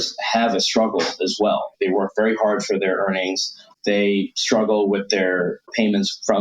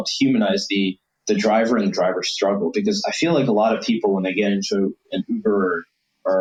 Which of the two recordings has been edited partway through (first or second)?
first